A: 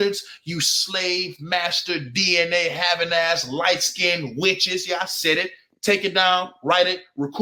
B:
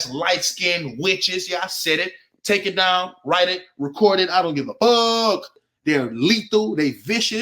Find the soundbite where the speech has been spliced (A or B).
B